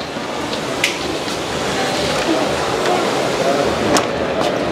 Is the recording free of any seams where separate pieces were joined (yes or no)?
yes